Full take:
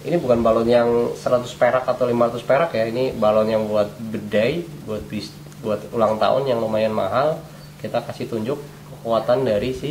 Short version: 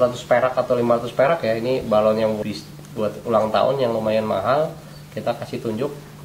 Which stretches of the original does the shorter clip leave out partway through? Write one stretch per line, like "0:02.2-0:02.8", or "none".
0:03.7-0:05.1